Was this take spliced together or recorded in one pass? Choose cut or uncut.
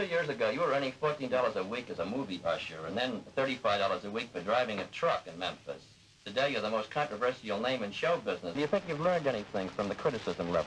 cut